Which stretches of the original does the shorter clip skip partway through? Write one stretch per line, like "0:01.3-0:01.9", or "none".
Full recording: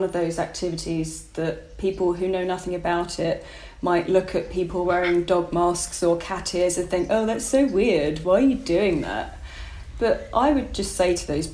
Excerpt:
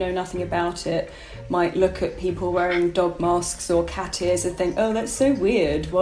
none